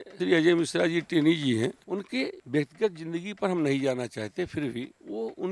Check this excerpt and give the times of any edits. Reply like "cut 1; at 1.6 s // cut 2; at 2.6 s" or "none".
cut 1; at 1.8 s